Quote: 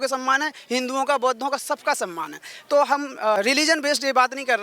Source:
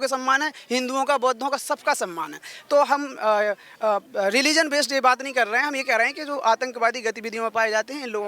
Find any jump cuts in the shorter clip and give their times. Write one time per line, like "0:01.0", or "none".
0:03.4